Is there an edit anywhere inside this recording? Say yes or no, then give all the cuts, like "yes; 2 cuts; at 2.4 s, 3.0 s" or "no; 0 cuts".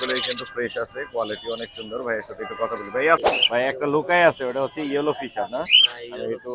yes; 1 cut; at 3.2 s